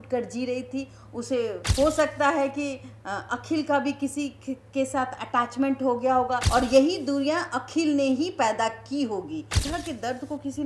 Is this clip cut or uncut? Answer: cut